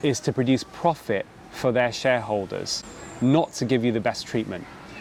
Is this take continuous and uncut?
yes; 0 cuts

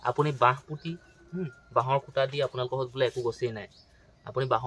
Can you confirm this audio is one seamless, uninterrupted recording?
yes; 0 cuts

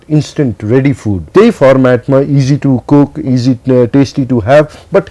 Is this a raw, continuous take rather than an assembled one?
no; 1 cut; at 1.2 s

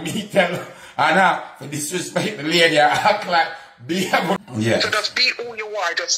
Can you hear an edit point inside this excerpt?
yes; 1 cut; at 4.4 s

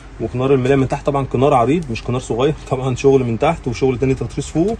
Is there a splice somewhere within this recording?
no; 0 cuts

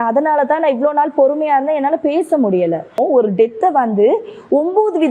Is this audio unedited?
no; 1 cut; at 3.0 s

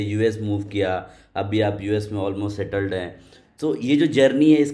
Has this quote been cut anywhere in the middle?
no; 0 cuts

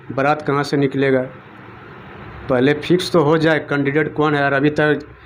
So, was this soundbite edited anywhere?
no; 0 cuts

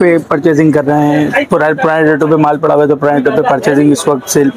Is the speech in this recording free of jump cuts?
yes; 0 cuts

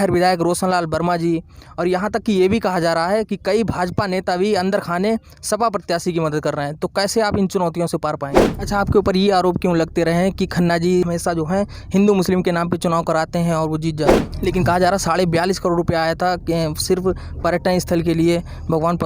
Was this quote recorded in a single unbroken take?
no; 2 cuts; at 8.5 s, 14.3 s

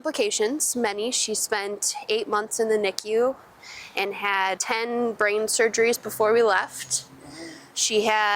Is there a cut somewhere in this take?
yes; 1 cut; at 4.6 s

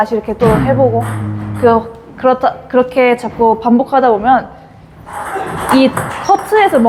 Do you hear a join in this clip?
no; 0 cuts

